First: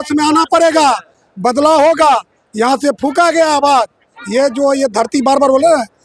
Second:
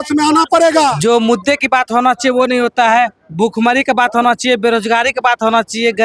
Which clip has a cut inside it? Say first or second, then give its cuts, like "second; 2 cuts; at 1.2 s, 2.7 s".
second; 1 cut; at 1.0 s